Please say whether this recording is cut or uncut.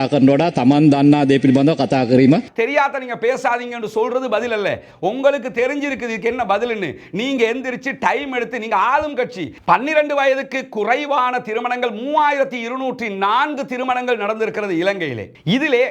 cut